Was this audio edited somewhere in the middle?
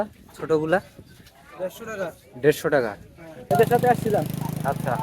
yes; 1 cut; at 3.5 s

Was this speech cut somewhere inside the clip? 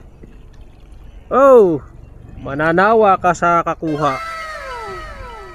yes; 1 cut; at 4.2 s

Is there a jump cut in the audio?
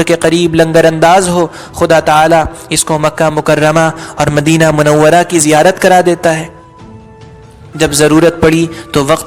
yes; 1 cut; at 7.6 s

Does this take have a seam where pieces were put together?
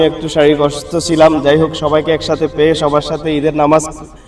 no; 0 cuts

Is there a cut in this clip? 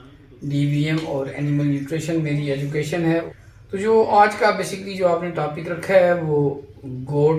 yes; 1 cut; at 3.3 s

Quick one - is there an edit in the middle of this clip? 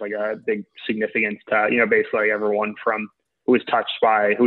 no; 0 cuts

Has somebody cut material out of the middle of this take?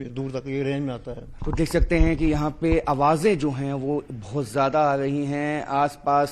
yes; 1 cut; at 1.7 s

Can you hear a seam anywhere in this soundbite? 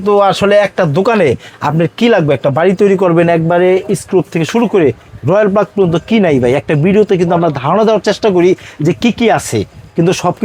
no; 0 cuts

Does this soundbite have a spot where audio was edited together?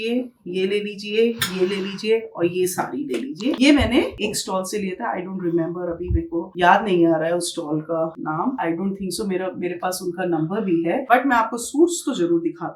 no; 0 cuts

